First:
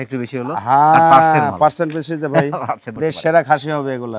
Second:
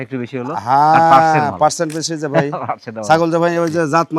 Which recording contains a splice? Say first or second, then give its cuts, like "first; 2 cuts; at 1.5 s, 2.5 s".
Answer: first; 1 cut; at 2.9 s